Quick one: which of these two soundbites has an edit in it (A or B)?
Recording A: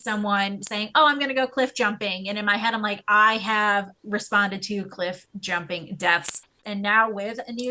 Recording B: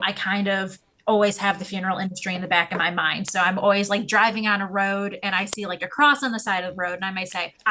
A